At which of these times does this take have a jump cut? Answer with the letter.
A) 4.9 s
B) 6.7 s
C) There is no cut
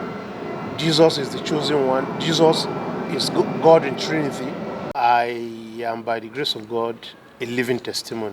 A